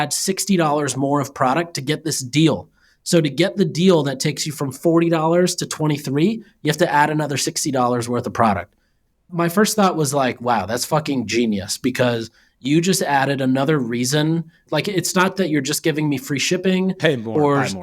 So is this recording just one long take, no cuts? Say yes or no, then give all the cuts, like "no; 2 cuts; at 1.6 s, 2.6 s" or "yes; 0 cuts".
no; 1 cut; at 14.6 s